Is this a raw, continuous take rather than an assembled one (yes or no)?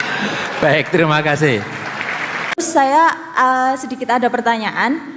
no